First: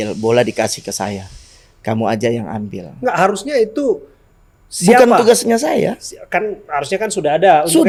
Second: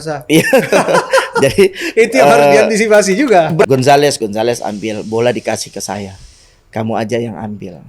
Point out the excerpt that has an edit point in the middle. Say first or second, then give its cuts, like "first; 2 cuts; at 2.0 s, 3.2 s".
second; 1 cut; at 3.7 s